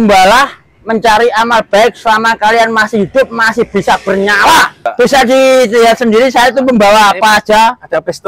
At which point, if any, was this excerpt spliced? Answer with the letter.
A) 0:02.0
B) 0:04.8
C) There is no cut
B